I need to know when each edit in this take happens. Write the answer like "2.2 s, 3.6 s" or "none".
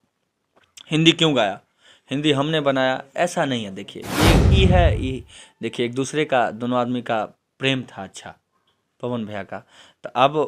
4.5 s